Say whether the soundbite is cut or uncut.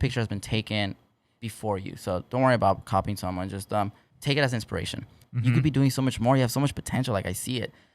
cut